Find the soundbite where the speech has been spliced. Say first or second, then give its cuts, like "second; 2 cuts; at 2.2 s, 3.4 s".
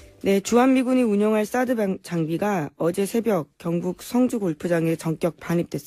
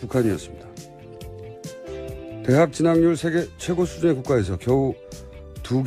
first; 1 cut; at 4.3 s